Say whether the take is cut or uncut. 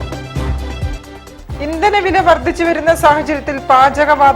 uncut